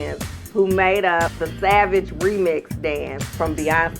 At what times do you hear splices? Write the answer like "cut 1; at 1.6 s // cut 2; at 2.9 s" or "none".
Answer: cut 1; at 1.4 s